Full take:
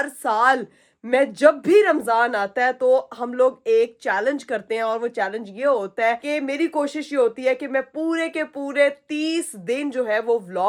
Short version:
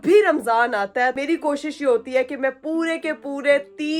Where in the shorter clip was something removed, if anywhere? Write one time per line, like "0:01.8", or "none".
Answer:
0:01.2

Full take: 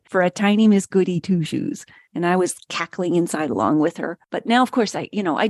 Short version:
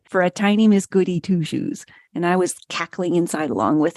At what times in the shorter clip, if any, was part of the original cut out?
none

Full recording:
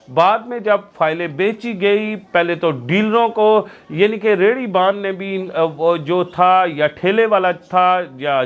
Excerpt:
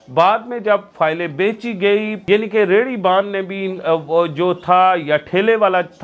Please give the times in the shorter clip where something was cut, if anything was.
0:02.1

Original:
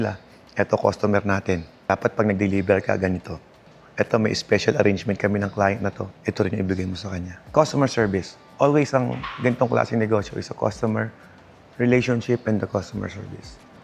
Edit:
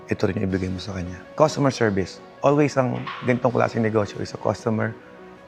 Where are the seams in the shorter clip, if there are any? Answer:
none

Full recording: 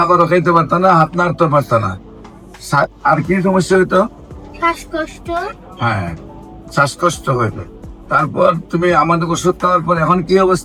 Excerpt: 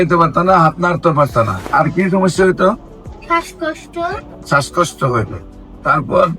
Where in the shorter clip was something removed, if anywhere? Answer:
0:01.6
0:04.3

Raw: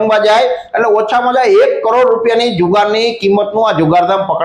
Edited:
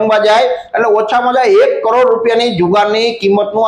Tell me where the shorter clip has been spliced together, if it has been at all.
none

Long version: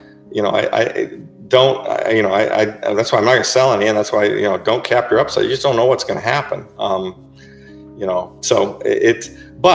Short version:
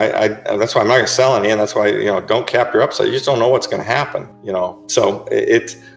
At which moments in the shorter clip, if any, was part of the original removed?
0:04.3

